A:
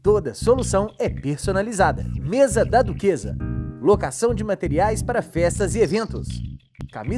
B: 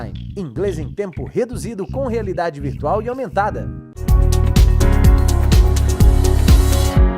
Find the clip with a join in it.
B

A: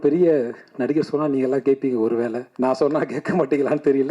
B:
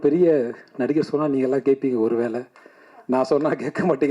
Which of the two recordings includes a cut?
A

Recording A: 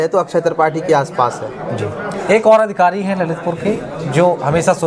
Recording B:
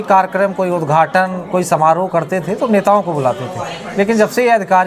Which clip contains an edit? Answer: A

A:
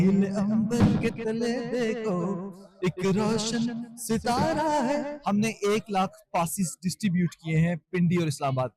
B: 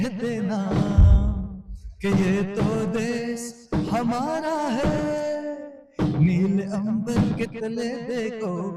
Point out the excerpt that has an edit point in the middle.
A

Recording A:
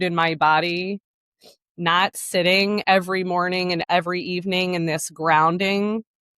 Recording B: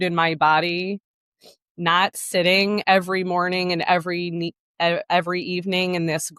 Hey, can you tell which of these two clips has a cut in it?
A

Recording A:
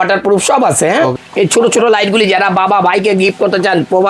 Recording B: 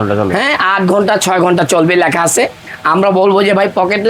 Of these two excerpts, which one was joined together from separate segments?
A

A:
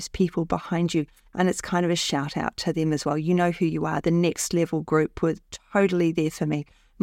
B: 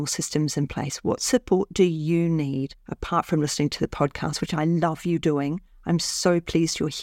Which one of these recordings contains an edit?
A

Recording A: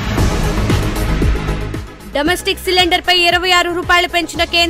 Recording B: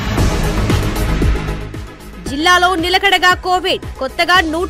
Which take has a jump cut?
B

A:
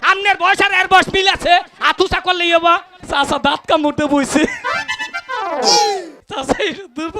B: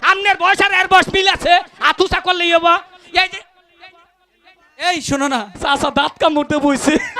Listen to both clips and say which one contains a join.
A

